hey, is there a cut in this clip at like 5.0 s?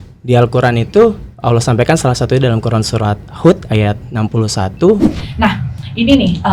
yes; 1 cut; at 5.0 s

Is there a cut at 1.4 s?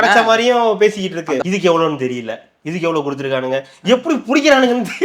yes; 1 cut; at 1.4 s

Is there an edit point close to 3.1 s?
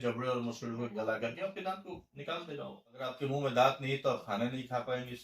yes; 1 cut; at 3.1 s

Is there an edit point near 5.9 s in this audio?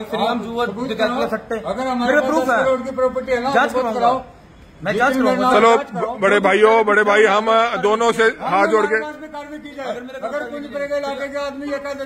no; 0 cuts

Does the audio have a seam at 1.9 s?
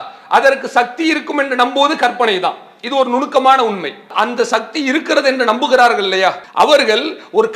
no; 2 cuts; at 4.1 s, 6.4 s

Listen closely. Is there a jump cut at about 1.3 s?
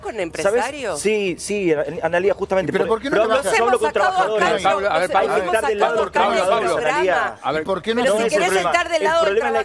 no; 0 cuts

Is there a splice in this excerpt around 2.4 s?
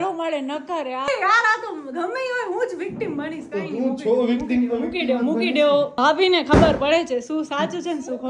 no; 2 cuts; at 1.1 s, 5.9 s

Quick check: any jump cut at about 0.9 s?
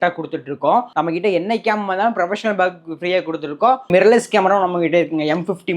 yes; 2 cuts; at 0.9 s, 3.9 s

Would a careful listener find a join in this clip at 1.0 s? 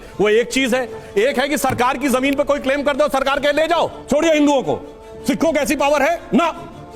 no; 1 cut; at 4.0 s

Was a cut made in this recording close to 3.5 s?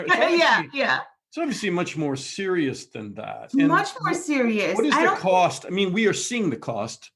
no; 0 cuts

